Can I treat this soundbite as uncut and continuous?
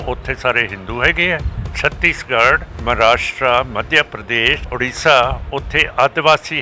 no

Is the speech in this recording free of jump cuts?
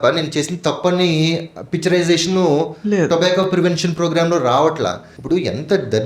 no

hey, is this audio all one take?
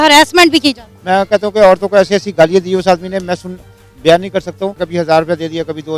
no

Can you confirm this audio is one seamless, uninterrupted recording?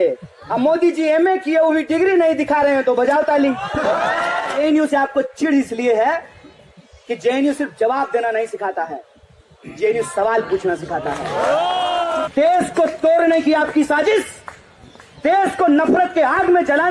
no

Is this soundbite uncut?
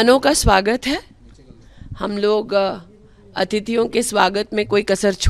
yes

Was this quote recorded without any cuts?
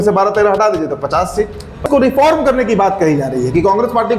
no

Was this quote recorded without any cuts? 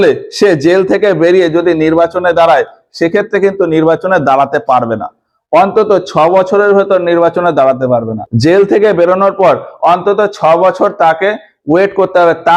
yes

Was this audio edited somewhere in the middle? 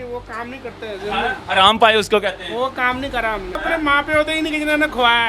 yes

